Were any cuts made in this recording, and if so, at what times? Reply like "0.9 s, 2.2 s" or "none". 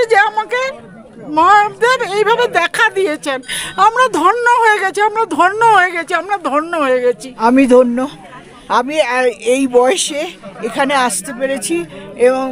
none